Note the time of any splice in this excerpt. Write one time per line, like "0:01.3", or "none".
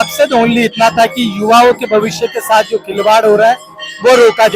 none